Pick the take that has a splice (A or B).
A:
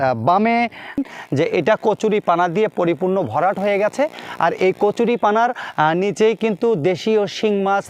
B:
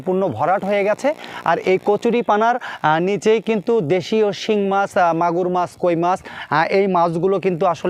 A